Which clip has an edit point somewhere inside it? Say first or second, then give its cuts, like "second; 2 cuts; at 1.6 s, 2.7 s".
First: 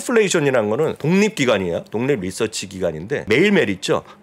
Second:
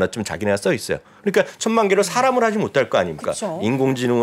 first; 2 cuts; at 1.0 s, 3.2 s